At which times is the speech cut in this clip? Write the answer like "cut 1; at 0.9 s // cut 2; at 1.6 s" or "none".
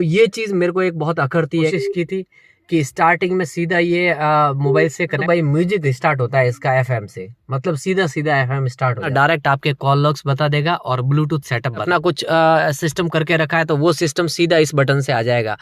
cut 1; at 1.5 s // cut 2; at 5.2 s // cut 3; at 9.1 s // cut 4; at 11.8 s